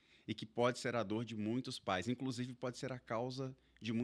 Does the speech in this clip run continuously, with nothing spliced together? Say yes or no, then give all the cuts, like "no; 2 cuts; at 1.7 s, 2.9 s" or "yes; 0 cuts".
yes; 0 cuts